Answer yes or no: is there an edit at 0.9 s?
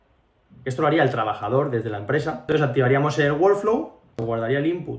no